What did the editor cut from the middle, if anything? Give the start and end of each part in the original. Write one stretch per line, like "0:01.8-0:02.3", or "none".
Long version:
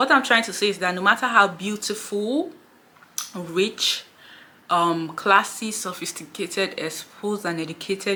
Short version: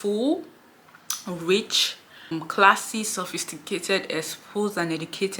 0:04.4-0:05.0